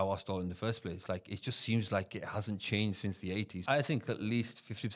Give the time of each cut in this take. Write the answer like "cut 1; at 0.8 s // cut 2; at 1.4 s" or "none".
cut 1; at 3.6 s